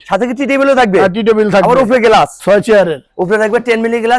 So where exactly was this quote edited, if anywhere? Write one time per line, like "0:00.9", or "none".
0:02.4